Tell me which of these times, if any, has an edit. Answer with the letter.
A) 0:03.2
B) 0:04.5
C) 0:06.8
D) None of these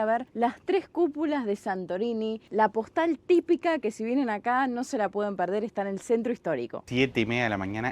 C